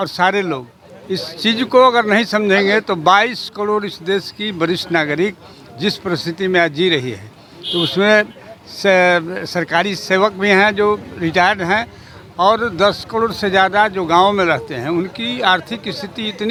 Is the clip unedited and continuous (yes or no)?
yes